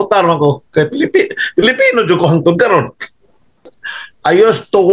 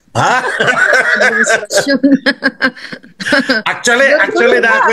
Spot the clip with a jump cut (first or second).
first